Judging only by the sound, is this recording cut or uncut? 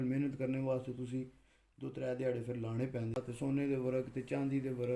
cut